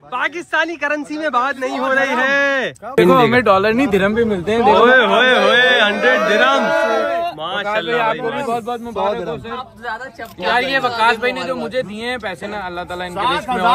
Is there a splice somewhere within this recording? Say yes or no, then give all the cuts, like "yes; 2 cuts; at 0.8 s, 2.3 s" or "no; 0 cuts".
yes; 1 cut; at 3.0 s